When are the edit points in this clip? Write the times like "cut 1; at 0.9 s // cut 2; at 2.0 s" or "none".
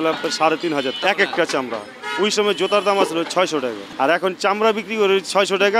cut 1; at 1.0 s // cut 2; at 3.8 s